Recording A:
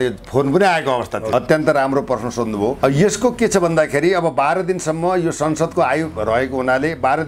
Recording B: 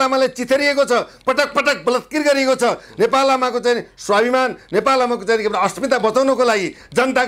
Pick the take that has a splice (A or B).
A